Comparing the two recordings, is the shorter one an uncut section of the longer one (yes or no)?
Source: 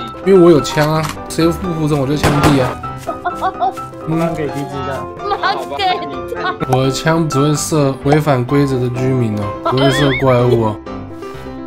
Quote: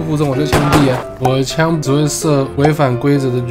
no